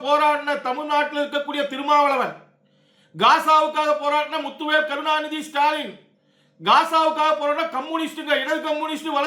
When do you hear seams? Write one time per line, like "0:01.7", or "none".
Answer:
none